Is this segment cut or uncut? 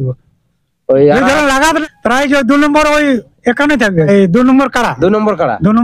cut